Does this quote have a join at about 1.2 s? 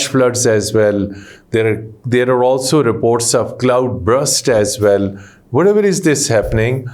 no; 0 cuts

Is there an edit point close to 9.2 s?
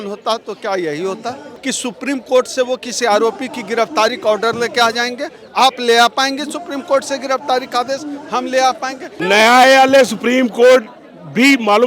yes; 2 cuts; at 1.5 s, 9.2 s

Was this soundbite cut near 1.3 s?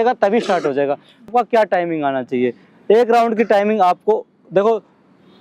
yes; 1 cut; at 1.3 s

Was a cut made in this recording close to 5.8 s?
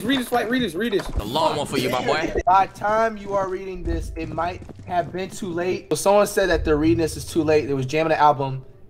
yes; 3 cuts; at 1.2 s, 2.3 s, 5.8 s

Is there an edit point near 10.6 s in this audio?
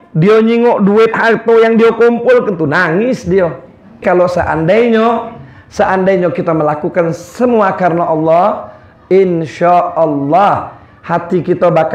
no; 1 cut; at 4.0 s

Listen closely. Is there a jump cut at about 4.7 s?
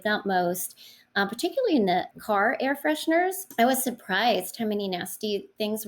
no; 2 cuts; at 2.1 s, 3.4 s

